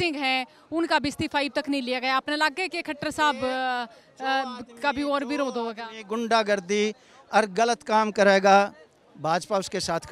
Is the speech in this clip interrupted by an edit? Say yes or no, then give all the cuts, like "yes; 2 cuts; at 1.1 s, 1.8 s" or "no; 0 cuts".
no; 0 cuts